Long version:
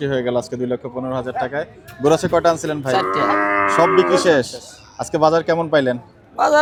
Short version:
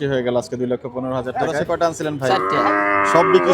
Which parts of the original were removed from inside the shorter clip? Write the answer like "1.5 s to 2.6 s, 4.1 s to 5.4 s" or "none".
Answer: 1.6 s to 2.3 s